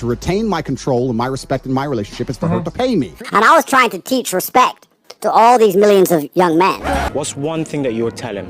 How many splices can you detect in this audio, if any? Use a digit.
0